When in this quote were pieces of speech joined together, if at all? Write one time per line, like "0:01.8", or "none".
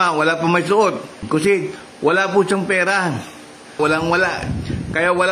0:01.2
0:03.8